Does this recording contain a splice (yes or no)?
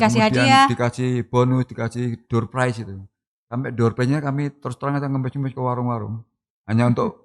no